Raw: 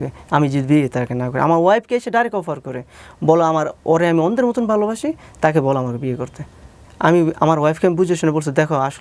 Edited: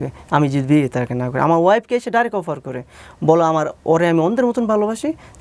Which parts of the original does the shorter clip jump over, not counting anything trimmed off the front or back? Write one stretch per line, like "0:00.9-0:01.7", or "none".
none